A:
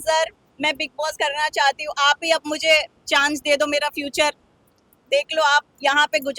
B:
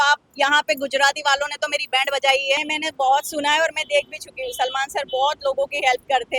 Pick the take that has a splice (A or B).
B